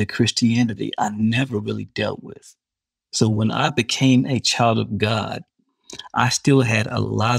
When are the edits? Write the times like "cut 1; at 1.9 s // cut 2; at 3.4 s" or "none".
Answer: cut 1; at 3.7 s